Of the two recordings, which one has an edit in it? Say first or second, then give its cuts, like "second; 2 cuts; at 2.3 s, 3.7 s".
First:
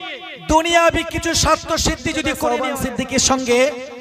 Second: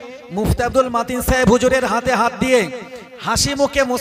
first; 1 cut; at 2.4 s